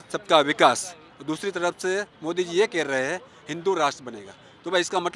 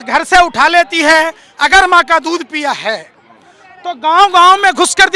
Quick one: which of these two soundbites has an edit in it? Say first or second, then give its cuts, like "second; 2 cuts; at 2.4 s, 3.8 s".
second; 1 cut; at 1.4 s